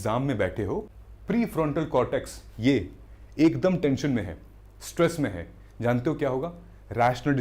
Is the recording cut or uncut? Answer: cut